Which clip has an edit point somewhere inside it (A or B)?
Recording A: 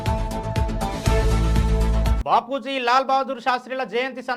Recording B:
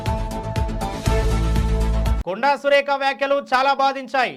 A